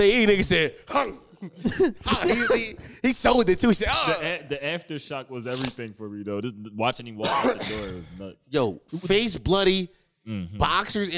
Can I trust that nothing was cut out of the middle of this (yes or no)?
yes